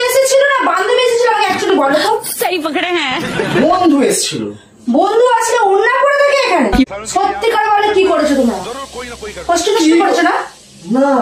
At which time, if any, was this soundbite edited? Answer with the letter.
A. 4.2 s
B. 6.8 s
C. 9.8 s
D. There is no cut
B